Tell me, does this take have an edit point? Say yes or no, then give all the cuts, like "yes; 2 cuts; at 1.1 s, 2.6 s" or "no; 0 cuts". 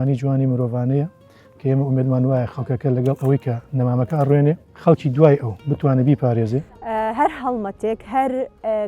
yes; 2 cuts; at 4.7 s, 6.7 s